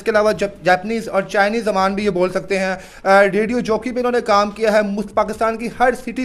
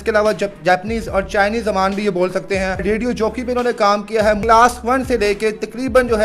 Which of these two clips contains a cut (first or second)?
second